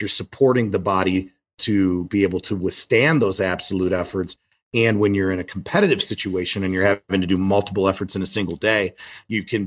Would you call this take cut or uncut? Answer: cut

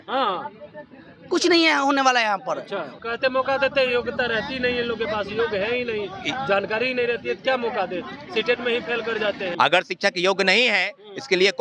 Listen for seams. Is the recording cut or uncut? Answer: cut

